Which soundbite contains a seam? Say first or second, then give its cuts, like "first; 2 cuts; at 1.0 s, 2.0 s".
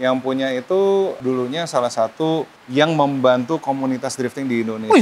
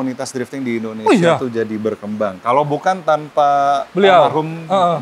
first; 2 cuts; at 1.2 s, 2.6 s